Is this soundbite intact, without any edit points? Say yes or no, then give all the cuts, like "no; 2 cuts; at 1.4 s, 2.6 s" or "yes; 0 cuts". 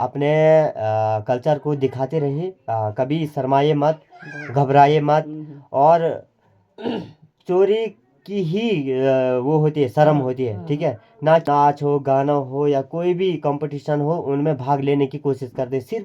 no; 1 cut; at 11.4 s